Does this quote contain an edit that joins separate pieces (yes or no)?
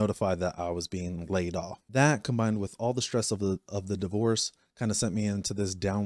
yes